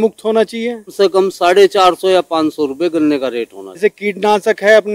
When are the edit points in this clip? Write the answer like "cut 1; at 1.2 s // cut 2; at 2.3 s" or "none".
cut 1; at 0.9 s // cut 2; at 3.8 s